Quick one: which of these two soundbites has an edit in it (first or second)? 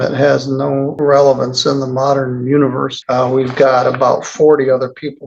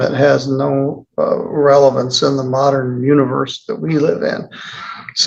first